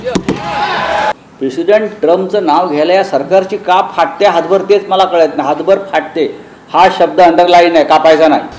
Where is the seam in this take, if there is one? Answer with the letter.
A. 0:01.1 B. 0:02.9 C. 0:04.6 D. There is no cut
A